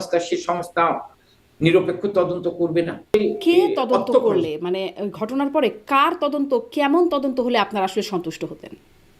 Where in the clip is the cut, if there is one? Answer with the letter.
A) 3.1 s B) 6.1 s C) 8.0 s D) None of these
A